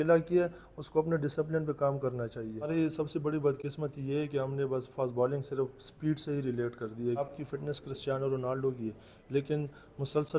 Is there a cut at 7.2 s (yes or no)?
yes